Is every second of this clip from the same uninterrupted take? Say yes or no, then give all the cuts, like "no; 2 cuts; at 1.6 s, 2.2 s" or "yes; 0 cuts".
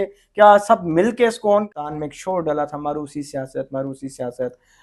no; 1 cut; at 1.7 s